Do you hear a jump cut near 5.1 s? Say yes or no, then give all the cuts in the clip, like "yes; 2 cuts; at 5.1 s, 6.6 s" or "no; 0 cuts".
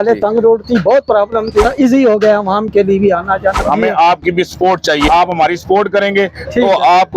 yes; 3 cuts; at 1.7 s, 3.6 s, 5.1 s